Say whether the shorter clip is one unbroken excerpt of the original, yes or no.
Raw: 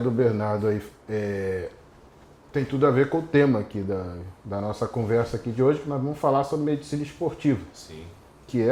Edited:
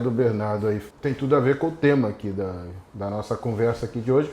no